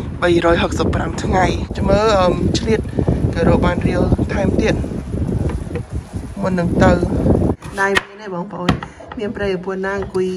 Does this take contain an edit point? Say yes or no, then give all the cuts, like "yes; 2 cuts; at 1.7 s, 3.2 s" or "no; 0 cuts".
yes; 2 cuts; at 1.7 s, 7.7 s